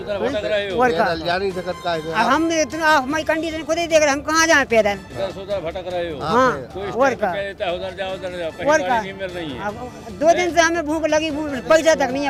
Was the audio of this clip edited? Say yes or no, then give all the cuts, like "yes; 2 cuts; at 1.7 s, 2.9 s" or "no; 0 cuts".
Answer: no; 0 cuts